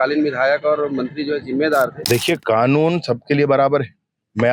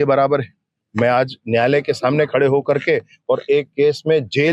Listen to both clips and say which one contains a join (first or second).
first